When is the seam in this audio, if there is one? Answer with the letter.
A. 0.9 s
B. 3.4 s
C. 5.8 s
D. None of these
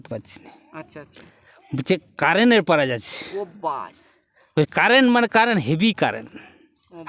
D